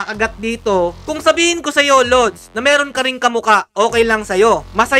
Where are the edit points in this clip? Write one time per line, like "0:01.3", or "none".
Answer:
0:01.0